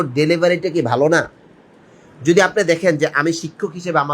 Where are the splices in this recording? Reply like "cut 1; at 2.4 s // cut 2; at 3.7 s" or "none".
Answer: none